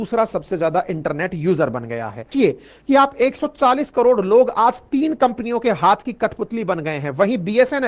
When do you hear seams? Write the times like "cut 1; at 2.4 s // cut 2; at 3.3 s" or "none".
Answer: cut 1; at 2.3 s